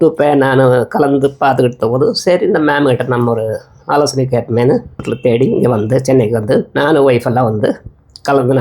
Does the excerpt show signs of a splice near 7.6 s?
no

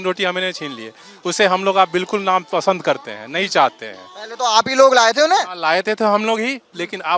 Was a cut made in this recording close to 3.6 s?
no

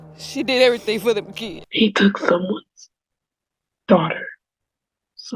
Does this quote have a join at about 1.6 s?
yes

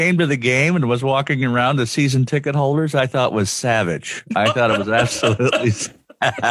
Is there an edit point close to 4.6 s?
no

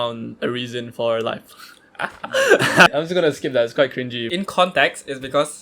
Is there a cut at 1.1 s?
no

